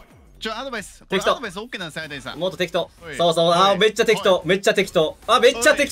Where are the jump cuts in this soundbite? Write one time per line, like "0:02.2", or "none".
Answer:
0:03.1